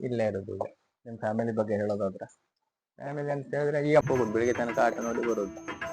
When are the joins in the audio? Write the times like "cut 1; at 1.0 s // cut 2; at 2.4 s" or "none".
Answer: cut 1; at 4.0 s